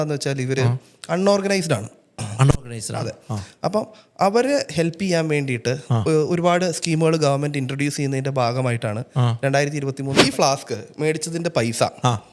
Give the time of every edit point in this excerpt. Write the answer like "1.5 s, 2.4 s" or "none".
10.2 s